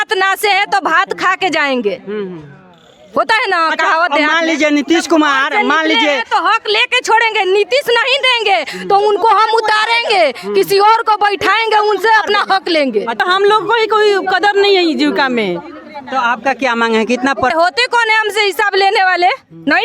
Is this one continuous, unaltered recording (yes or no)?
no